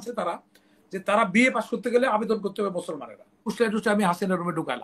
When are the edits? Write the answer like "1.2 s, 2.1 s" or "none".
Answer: 3.5 s